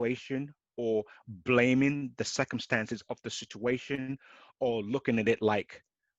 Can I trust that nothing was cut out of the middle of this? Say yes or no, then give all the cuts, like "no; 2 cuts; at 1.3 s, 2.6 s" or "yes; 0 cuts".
yes; 0 cuts